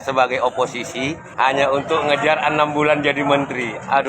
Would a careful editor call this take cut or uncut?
cut